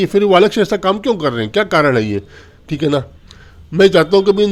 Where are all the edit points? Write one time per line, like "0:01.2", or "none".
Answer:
none